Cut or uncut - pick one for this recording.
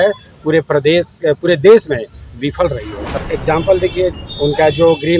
cut